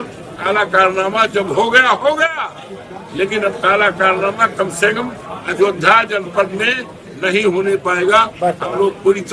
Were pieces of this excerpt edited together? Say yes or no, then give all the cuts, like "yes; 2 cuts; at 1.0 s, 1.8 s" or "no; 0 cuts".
no; 0 cuts